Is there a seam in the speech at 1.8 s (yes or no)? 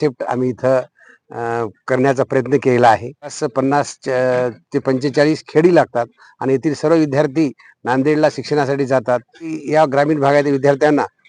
no